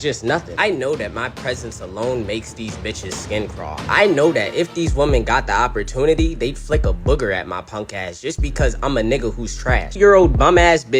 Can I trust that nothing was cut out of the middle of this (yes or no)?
no